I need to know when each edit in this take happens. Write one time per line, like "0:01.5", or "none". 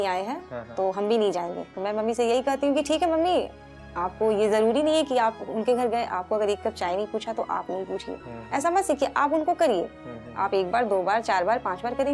0:01.7

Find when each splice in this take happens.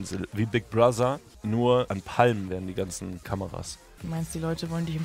0:01.3
0:02.0
0:03.2

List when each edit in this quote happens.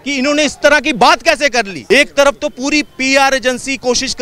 0:01.8

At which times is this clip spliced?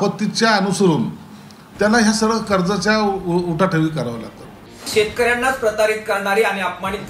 0:04.8

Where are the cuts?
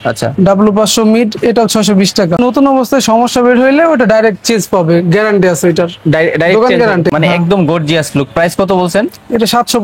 0:02.4
0:07.1

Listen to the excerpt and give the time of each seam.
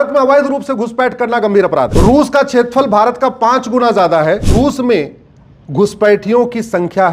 0:01.9
0:04.5

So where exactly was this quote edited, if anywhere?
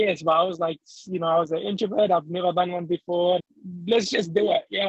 0:03.4

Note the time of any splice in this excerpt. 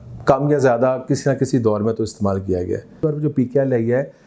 0:03.0

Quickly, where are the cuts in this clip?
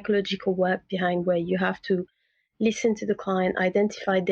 none

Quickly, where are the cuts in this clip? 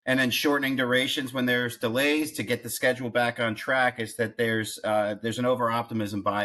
none

